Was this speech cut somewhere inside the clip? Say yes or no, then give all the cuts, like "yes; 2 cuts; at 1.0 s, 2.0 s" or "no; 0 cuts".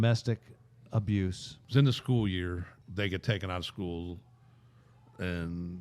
yes; 2 cuts; at 1.5 s, 2.7 s